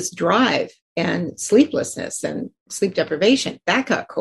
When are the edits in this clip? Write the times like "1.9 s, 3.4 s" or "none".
none